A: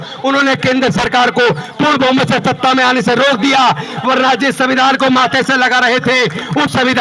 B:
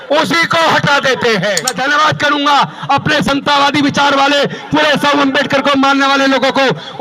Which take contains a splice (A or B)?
B